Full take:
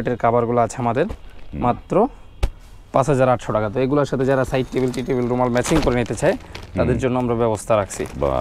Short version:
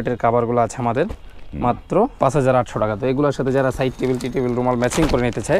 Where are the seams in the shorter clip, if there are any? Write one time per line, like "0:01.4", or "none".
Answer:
0:02.1